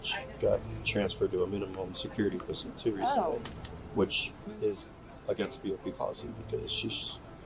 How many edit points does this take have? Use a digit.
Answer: 0